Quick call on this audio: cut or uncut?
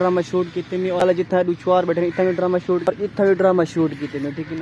cut